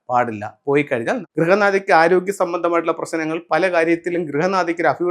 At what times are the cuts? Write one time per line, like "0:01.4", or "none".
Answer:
0:01.3